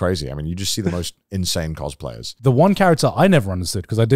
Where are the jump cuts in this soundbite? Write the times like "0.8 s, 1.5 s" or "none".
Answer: 2.2 s